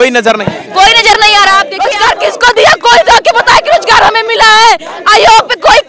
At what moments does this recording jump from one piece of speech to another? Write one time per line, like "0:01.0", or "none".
0:01.8